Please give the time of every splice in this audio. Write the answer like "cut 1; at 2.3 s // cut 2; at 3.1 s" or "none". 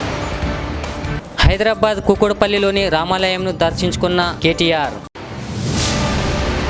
cut 1; at 1.2 s